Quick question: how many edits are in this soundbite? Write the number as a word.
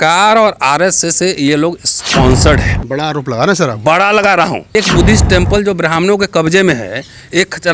one